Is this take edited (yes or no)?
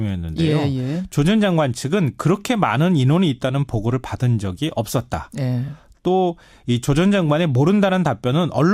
yes